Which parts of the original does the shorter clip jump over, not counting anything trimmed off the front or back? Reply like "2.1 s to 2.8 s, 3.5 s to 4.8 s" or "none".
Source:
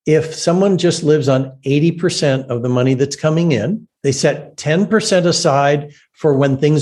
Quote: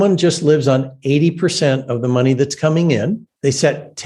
none